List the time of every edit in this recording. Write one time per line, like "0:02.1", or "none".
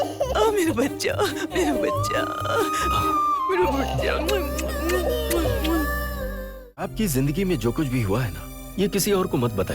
0:06.8